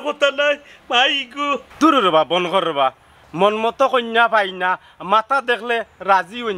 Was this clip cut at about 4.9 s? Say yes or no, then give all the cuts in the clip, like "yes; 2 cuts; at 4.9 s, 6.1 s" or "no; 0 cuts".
no; 1 cut; at 1.7 s